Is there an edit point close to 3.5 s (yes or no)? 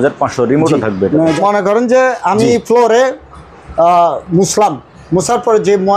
no